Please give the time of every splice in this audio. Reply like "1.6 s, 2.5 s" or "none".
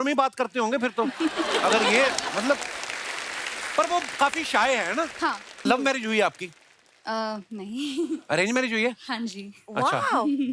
5.6 s